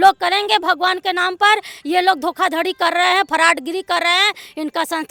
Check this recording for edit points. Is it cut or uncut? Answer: uncut